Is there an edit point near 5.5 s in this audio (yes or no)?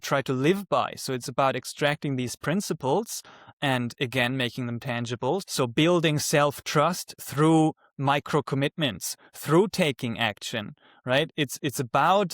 yes